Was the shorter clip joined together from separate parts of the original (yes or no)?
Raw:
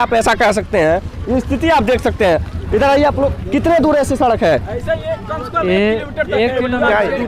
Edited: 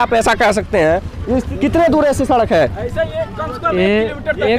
yes